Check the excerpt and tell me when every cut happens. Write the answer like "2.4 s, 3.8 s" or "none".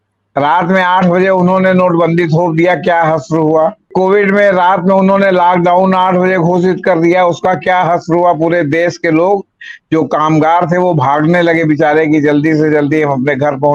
3.9 s